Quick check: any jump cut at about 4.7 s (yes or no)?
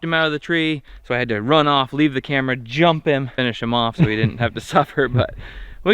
no